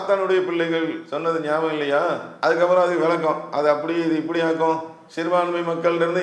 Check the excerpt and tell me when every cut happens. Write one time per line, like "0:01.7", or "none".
0:01.1
0:02.3

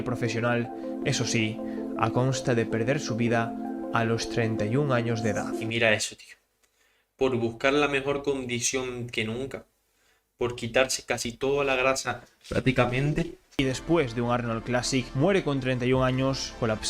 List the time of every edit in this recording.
0:13.6

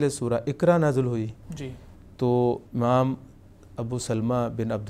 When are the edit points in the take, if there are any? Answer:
none

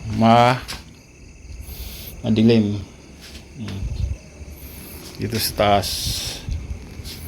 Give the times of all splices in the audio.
none

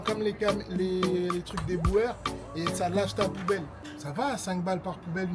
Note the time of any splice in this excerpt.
0:03.8

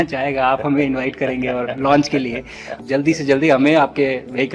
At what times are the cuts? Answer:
0:02.8

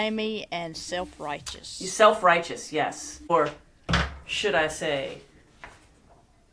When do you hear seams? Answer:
0:03.3

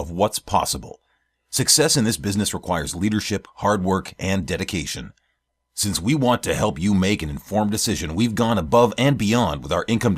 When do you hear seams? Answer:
none

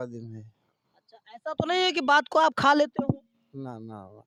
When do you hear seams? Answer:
none

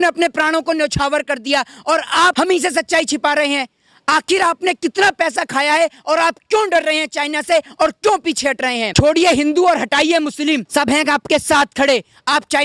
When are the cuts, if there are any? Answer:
0:02.3
0:08.9
0:10.7

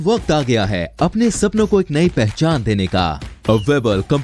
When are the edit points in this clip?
none

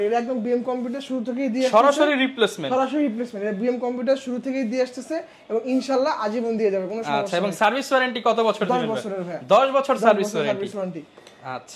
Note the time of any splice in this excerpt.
none

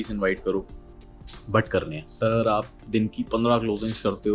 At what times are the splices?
0:02.2

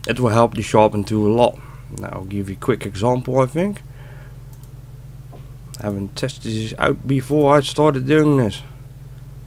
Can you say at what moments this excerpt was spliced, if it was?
none

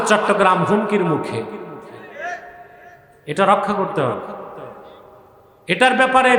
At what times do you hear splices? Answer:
none

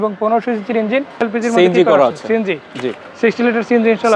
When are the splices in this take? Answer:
0:01.2

